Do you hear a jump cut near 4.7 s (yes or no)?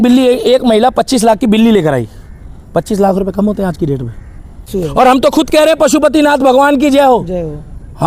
yes